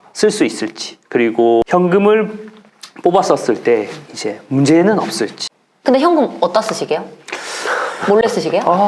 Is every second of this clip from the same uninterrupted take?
no; 2 cuts; at 1.7 s, 5.3 s

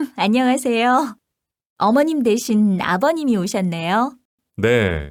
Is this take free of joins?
yes; 0 cuts

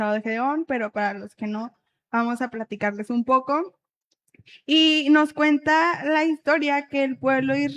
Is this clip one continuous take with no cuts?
yes; 0 cuts

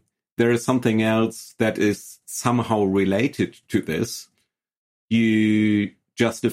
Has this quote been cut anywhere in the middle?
no; 0 cuts

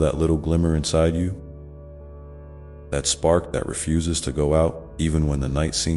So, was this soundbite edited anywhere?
no; 0 cuts

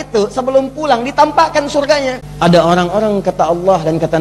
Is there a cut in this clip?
yes; 1 cut; at 2.2 s

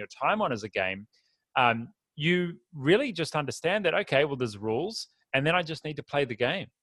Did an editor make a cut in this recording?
no; 0 cuts

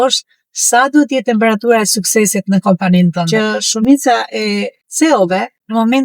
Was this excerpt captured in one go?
no; 1 cut; at 3.2 s

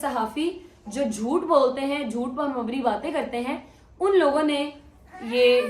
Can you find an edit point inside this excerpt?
no; 0 cuts

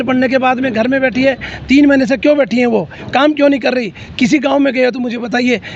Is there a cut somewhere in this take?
no; 0 cuts

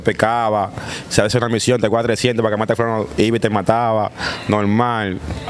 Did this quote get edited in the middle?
no; 0 cuts

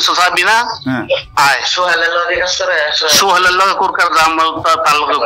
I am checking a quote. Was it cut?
no; 0 cuts

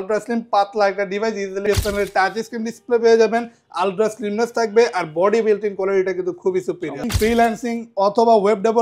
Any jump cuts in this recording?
yes; 2 cuts; at 1.6 s, 7.1 s

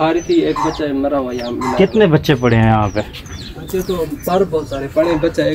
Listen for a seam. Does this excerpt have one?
no; 0 cuts

